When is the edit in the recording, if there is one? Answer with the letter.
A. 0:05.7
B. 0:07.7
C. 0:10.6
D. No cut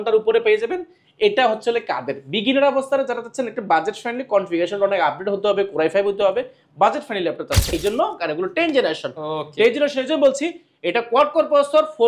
B